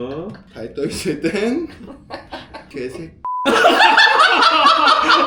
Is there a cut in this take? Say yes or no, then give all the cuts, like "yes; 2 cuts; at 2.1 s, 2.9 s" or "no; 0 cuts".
no; 0 cuts